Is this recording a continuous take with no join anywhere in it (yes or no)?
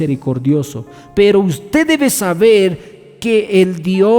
no